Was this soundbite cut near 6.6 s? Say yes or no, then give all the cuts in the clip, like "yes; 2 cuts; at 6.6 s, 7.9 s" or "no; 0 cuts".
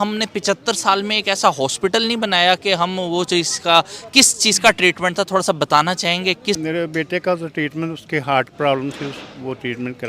yes; 1 cut; at 6.6 s